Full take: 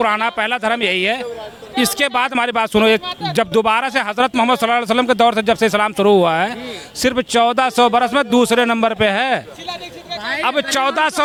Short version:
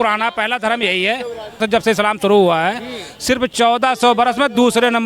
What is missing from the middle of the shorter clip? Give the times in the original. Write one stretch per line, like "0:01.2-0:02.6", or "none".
0:01.6-0:05.3

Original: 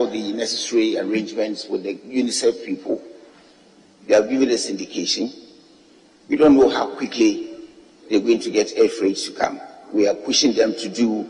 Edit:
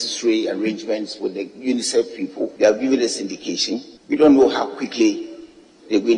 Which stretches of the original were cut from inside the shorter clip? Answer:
0:03.0-0:04.0
0:05.4-0:06.1

